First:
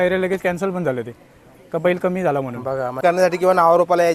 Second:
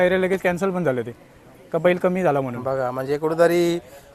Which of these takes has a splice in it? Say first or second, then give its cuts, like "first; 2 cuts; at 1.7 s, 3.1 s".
first; 1 cut; at 3.0 s